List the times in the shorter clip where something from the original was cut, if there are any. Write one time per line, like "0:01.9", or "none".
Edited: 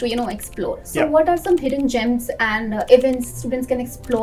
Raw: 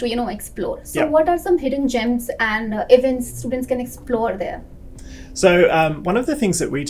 none